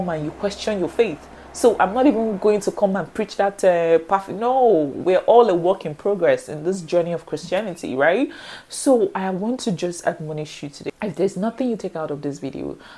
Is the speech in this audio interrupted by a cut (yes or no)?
no